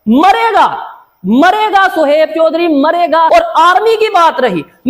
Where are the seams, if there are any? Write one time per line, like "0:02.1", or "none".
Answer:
0:03.3